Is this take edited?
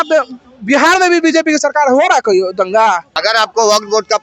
yes; 1 cut; at 3.1 s

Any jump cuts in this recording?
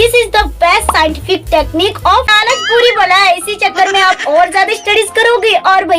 yes; 1 cut; at 2.3 s

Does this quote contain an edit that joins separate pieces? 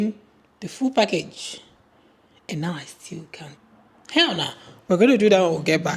yes; 1 cut; at 3.6 s

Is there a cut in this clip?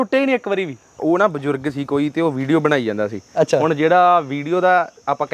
yes; 1 cut; at 1.0 s

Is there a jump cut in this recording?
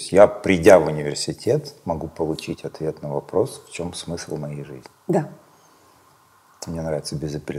no; 0 cuts

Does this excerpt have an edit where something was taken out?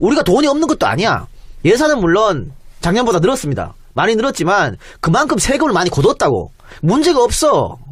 yes; 1 cut; at 6.2 s

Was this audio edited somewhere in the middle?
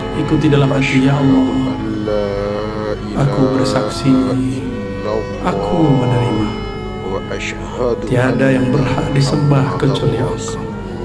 no; 0 cuts

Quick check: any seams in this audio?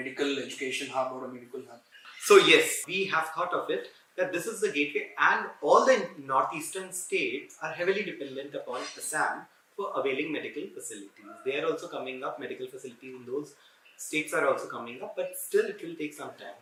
no; 0 cuts

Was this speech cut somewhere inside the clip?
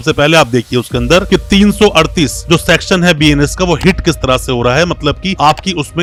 no; 0 cuts

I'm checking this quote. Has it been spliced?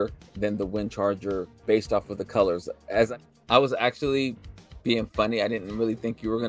yes; 1 cut; at 3.1 s

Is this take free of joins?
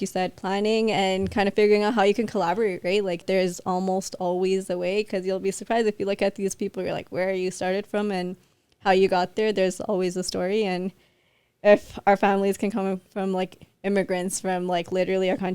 no; 1 cut; at 3.2 s

